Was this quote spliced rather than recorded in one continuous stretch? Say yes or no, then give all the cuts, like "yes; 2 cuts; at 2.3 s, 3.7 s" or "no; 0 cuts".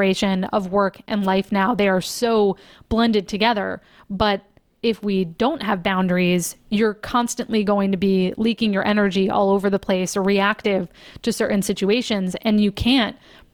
no; 0 cuts